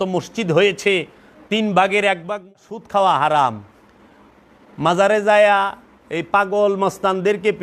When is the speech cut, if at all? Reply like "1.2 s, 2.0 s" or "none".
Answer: 2.7 s